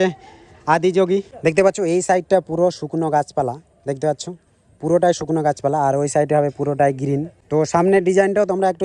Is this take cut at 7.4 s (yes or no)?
yes